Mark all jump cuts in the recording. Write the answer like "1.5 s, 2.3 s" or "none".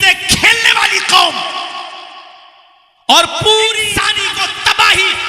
3.9 s